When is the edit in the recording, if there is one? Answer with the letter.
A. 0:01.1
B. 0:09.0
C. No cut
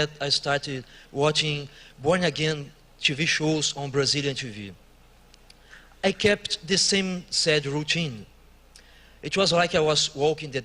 A